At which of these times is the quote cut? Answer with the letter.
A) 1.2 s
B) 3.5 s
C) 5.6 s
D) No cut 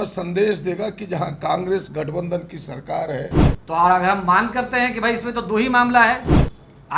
B